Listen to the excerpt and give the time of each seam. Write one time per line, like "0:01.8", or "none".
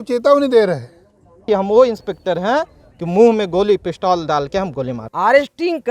0:01.4
0:05.0

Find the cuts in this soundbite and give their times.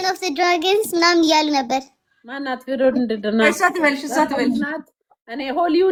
none

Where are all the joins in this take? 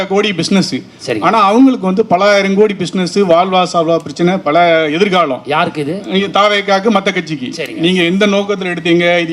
none

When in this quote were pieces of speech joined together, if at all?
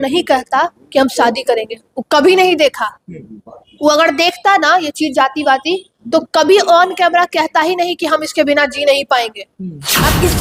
none

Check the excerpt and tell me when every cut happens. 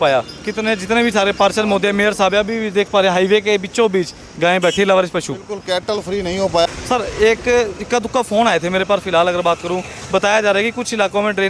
0:06.7

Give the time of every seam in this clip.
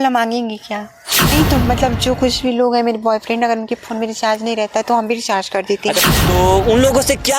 0:01.3
0:06.0

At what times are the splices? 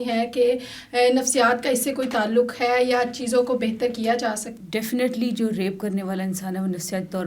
0:04.5

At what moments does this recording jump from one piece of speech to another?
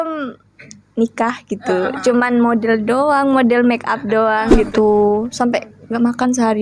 0:04.6

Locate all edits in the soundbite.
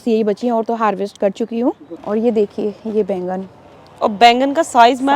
0:01.9

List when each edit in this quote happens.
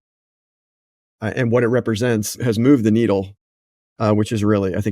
0:02.4

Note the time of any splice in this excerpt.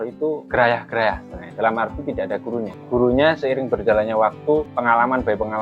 0:02.8
0:04.7

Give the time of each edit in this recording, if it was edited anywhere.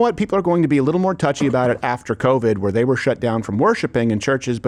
none

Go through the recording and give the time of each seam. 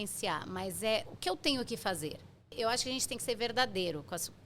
0:01.1
0:02.5

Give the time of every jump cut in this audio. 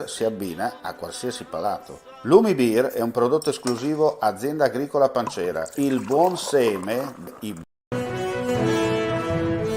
0:07.6

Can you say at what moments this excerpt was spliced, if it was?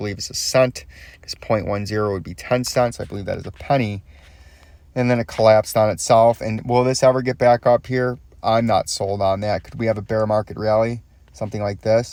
none

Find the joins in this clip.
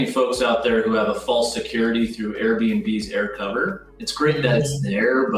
none

